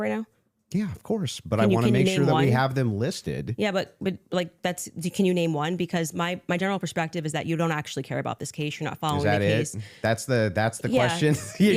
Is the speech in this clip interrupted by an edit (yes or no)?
no